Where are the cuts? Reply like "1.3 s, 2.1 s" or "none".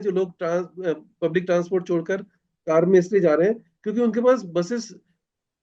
none